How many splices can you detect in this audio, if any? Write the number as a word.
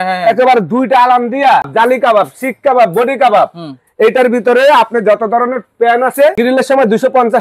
two